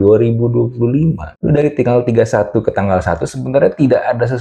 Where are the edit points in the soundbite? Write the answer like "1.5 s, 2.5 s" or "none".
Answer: none